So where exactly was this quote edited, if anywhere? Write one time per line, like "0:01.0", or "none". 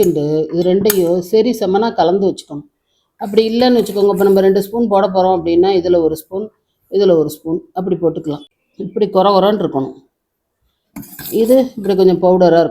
0:08.5